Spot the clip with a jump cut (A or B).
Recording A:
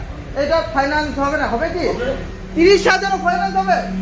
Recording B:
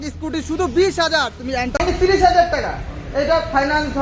B